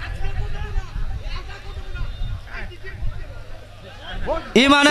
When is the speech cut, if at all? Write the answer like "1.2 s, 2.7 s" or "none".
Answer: none